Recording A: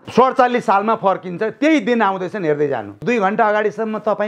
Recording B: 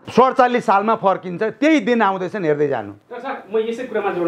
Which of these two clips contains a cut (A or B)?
A